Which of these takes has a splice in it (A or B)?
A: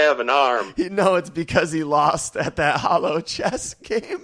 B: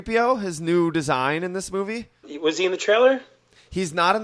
B